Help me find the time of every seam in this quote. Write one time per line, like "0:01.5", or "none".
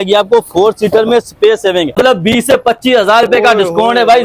0:01.9